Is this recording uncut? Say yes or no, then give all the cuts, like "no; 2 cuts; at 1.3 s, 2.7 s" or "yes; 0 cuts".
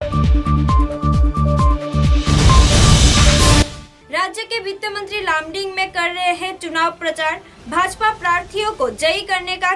no; 1 cut; at 3.7 s